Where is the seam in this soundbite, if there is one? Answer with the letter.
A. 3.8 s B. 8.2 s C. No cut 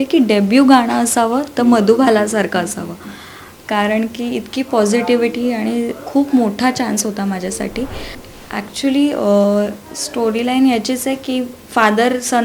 B